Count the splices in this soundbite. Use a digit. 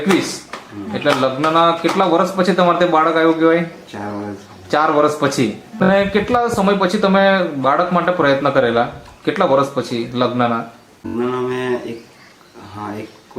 2